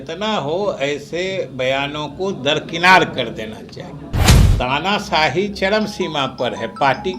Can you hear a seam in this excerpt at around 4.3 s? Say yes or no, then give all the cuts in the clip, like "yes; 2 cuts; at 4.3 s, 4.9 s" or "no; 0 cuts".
yes; 1 cut; at 4.3 s